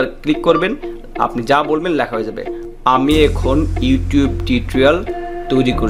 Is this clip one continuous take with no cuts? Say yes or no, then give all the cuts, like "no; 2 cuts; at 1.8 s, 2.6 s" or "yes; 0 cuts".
yes; 0 cuts